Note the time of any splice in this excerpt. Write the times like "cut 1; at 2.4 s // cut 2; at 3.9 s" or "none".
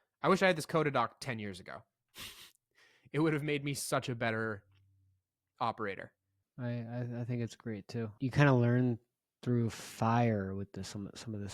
cut 1; at 8.1 s